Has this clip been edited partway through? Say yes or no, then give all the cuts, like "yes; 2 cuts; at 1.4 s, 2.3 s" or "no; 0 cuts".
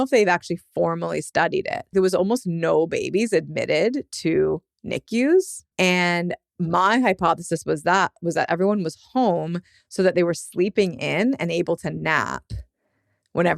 yes; 2 cuts; at 1.9 s, 5.6 s